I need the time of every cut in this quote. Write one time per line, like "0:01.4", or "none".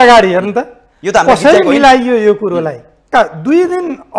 0:03.1